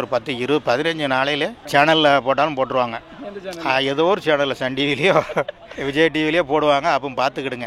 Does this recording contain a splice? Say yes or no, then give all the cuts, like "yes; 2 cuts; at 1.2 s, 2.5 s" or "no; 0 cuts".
no; 0 cuts